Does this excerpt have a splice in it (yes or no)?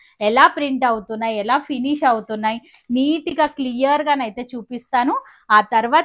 no